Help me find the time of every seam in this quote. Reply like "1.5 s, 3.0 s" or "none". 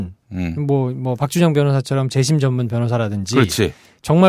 1.2 s